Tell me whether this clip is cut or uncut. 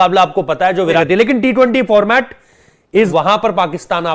cut